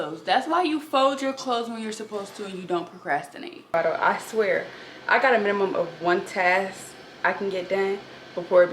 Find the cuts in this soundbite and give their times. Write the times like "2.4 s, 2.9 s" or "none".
3.7 s